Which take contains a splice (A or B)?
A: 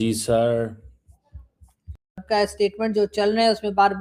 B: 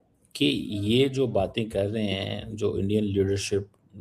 A